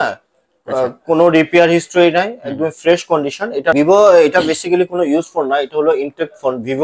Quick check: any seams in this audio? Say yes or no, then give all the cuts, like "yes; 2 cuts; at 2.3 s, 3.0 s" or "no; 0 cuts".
yes; 1 cut; at 3.7 s